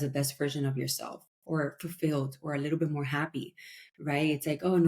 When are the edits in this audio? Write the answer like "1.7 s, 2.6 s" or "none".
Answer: none

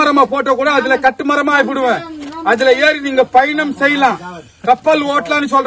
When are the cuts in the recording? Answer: none

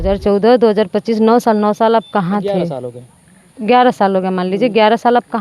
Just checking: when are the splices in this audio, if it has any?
none

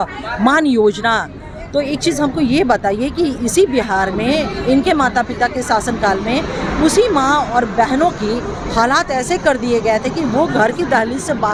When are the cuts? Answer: none

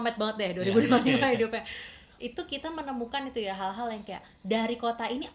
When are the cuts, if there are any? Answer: none

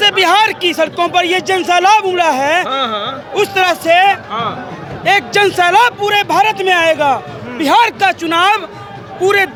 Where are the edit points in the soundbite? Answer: none

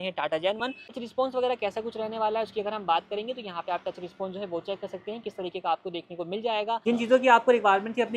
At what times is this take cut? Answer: 1.0 s, 6.8 s

